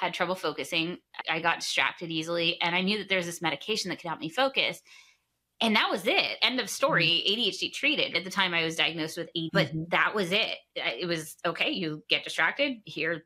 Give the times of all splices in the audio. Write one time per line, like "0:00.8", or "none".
0:01.2
0:06.4
0:08.1